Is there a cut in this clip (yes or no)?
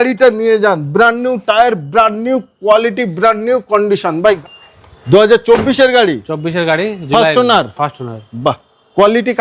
yes